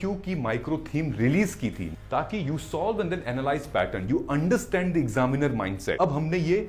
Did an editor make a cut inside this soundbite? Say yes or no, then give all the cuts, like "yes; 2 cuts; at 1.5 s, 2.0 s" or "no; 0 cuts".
yes; 2 cuts; at 1.9 s, 6.0 s